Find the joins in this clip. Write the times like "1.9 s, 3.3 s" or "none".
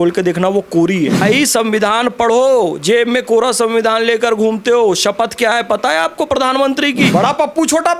1.2 s, 7.1 s